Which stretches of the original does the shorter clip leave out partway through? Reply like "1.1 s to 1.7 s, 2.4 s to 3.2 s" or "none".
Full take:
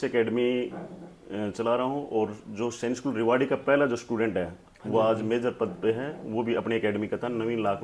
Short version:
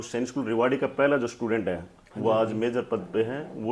none